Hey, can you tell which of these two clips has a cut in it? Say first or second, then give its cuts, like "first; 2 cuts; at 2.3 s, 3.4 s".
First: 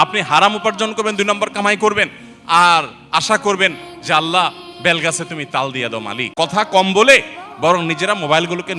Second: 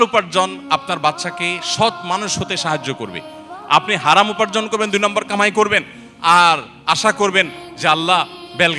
first; 1 cut; at 6.2 s